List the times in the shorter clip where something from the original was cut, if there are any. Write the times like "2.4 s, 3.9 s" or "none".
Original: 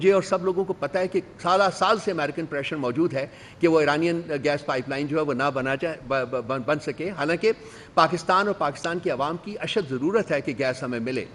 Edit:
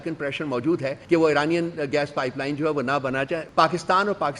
1.0 s, 3.5 s